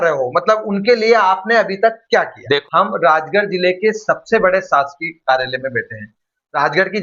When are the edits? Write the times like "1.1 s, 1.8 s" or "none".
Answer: 2.6 s